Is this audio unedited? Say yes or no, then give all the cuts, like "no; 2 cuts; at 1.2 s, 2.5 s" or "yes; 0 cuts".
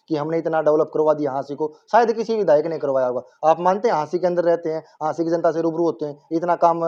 yes; 0 cuts